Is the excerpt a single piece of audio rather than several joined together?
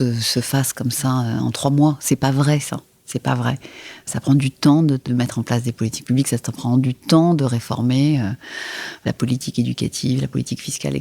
no; 3 cuts; at 4.1 s, 5.0 s, 9.0 s

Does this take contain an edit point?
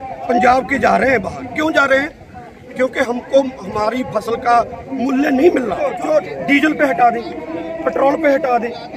yes; 1 cut; at 6.0 s

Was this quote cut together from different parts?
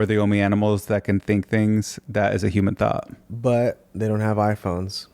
yes; 1 cut; at 3.2 s

